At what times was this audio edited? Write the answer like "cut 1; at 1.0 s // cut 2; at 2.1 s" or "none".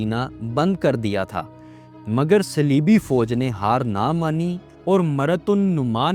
none